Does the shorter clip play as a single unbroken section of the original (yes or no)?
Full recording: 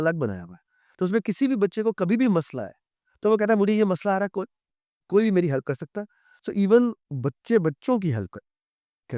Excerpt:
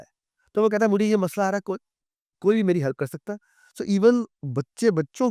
yes